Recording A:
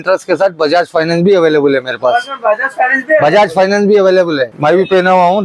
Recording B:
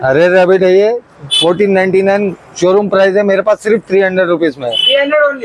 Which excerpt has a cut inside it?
A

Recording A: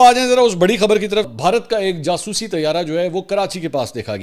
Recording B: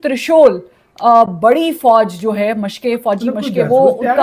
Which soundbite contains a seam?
A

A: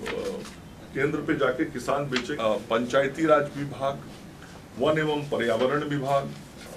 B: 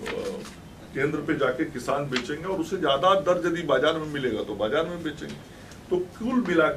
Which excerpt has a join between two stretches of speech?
A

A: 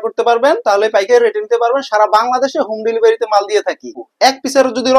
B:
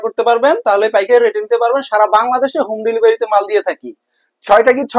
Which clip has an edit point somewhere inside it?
A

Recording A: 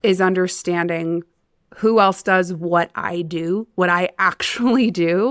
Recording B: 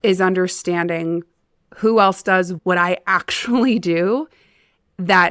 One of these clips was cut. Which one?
B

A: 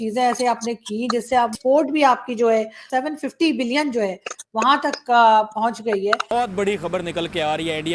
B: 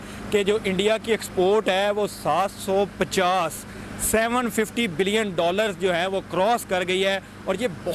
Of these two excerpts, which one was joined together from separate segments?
A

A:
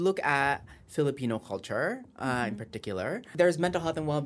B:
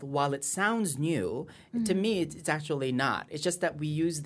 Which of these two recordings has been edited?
A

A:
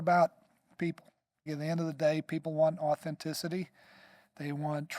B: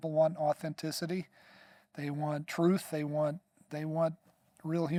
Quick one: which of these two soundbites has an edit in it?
A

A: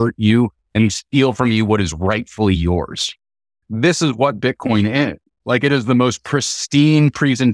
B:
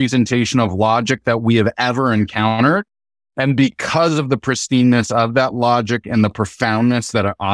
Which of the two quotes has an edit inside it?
A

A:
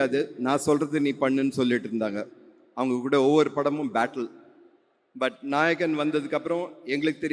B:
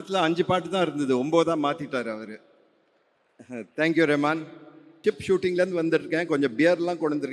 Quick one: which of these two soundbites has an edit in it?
B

